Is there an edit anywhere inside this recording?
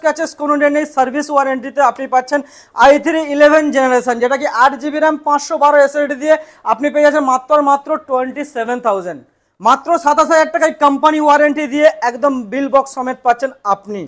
no; 0 cuts

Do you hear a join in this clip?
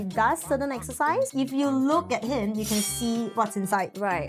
yes; 1 cut; at 1.3 s

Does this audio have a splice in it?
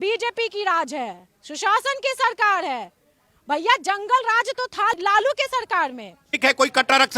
yes; 2 cuts; at 5.0 s, 6.3 s

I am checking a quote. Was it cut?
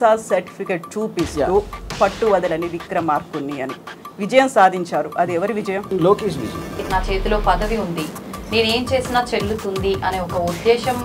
yes; 2 cuts; at 5.9 s, 6.8 s

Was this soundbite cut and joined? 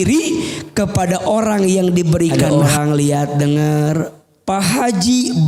yes; 1 cut; at 2.5 s

